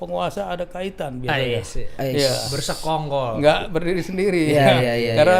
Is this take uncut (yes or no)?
yes